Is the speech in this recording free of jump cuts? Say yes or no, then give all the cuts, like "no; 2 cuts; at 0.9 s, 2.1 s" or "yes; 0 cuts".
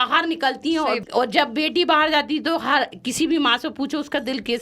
no; 1 cut; at 1.0 s